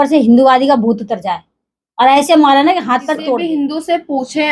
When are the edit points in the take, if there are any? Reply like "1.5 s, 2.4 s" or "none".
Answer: 3.4 s

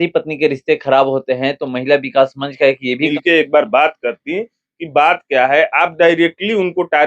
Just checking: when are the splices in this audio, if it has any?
3.1 s

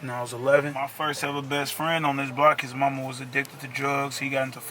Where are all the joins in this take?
1.0 s

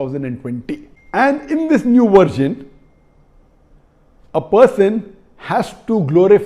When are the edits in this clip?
0.9 s

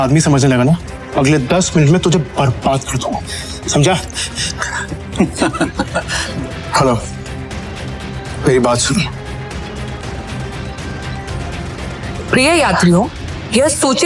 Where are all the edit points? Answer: 1.0 s, 6.2 s, 10.0 s

